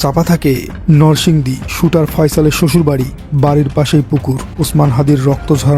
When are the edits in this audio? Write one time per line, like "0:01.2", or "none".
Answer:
0:04.6